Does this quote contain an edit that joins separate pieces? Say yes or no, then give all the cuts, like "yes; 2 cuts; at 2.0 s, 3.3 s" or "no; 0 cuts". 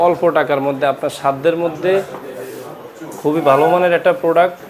no; 0 cuts